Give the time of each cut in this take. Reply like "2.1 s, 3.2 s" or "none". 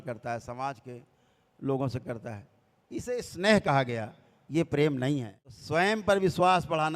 6.0 s